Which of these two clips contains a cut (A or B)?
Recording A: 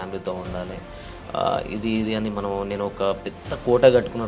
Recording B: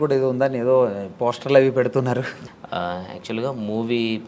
B